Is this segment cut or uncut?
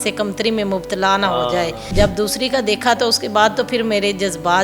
cut